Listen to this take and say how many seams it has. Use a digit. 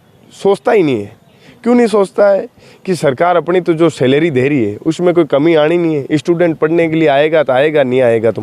0